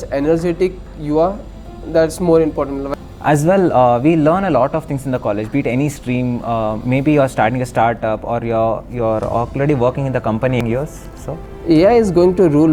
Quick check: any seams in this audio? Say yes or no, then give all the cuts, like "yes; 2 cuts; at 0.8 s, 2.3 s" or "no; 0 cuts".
yes; 2 cuts; at 2.9 s, 10.6 s